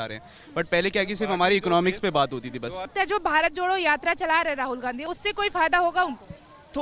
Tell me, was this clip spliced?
yes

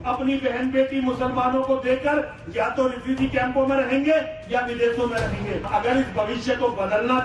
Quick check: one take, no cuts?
no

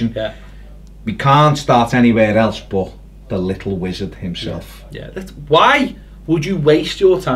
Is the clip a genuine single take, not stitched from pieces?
yes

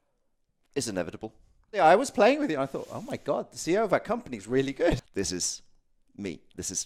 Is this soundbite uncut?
no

